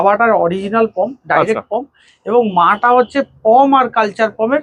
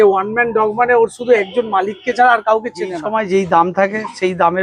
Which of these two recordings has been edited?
second; 1 cut; at 3.0 s

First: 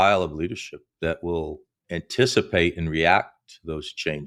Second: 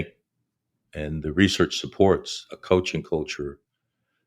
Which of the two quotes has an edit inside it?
second; 1 cut; at 1.2 s

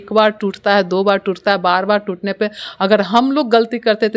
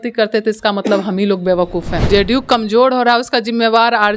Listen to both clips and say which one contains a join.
second; 1 cut; at 2.0 s

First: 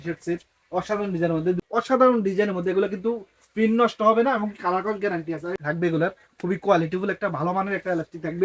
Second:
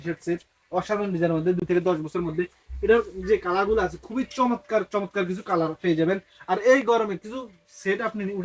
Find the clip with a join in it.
first; 2 cuts; at 1.6 s, 5.6 s

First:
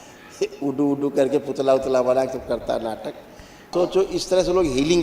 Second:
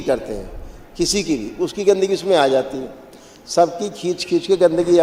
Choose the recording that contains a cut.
first; 1 cut; at 3.7 s

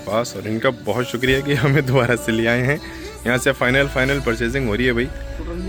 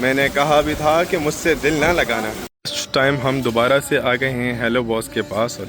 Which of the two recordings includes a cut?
second; 1 cut; at 2.4 s

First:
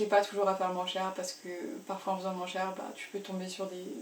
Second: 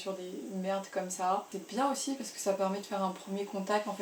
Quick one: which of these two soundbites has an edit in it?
second; 1 cut; at 1.5 s

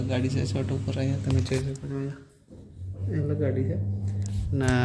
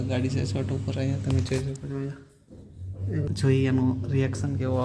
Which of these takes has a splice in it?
second; 1 cut; at 3.3 s

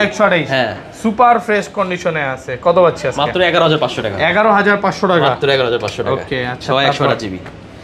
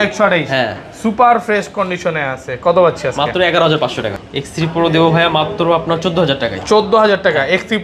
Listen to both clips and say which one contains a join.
second; 1 cut; at 4.2 s

